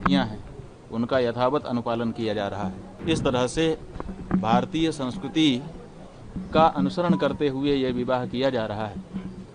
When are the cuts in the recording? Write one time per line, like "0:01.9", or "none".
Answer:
0:02.9